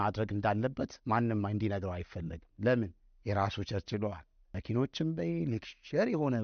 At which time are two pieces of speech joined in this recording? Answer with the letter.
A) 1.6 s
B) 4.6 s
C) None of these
B